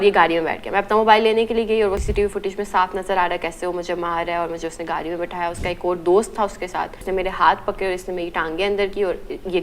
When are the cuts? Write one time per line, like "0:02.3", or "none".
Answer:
0:02.1
0:07.0

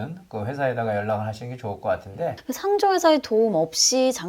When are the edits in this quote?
0:02.5

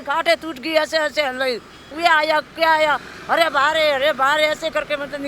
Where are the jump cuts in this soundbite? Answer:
0:01.8

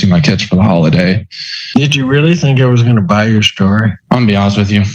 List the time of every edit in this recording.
0:01.4

